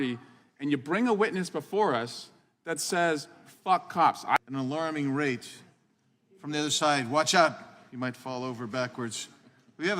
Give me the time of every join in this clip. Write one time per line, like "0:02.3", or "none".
0:04.4